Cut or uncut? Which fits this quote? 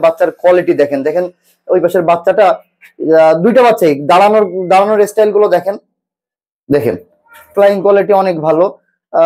cut